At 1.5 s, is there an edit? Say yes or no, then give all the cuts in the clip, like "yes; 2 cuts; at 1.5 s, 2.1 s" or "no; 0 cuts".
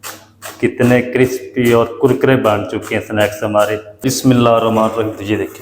no; 1 cut; at 4.0 s